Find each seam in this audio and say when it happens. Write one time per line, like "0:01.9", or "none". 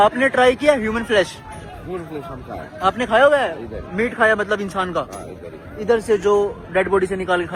none